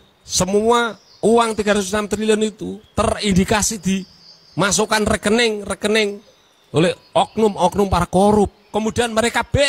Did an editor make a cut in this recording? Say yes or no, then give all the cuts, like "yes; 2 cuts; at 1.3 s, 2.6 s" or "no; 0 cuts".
no; 0 cuts